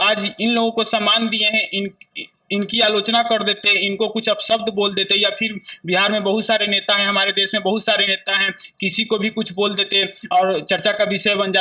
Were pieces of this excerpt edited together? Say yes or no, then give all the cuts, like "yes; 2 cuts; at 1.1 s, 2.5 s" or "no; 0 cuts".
no; 0 cuts